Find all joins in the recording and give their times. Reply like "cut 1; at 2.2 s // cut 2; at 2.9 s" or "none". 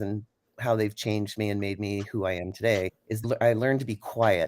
cut 1; at 3.2 s